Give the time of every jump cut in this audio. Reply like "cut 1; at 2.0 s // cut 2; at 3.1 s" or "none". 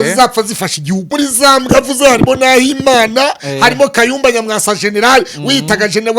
cut 1; at 1.1 s